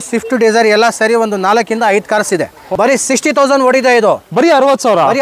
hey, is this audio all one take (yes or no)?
no